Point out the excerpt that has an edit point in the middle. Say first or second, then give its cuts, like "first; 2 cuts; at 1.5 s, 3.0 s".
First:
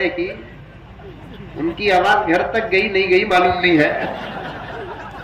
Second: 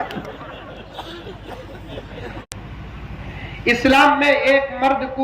second; 1 cut; at 2.4 s